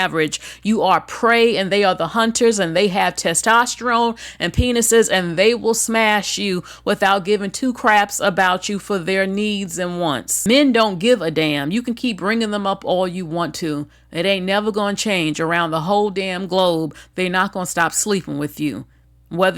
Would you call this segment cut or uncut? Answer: cut